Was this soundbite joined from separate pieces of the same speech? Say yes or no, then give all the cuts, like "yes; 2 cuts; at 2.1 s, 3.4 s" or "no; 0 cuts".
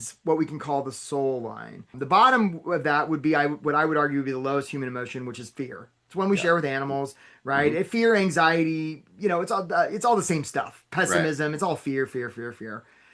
yes; 1 cut; at 1.9 s